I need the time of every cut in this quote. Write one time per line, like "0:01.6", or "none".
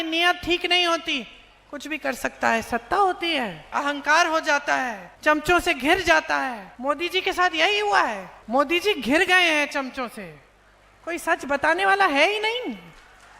0:03.7
0:05.0
0:06.7
0:08.3